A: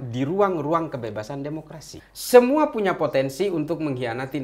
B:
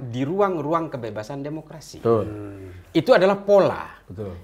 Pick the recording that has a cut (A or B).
A